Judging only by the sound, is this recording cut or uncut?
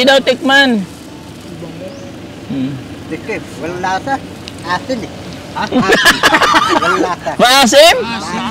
uncut